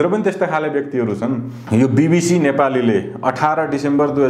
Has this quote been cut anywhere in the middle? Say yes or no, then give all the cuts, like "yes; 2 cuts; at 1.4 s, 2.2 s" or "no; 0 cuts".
yes; 1 cut; at 1.5 s